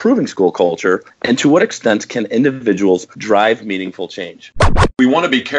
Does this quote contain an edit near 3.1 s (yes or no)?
no